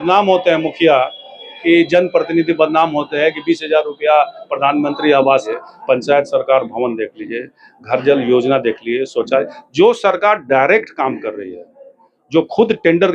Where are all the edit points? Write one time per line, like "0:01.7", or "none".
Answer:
0:05.5